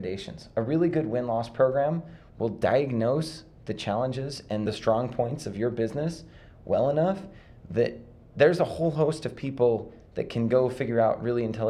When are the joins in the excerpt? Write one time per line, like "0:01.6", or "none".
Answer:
0:04.6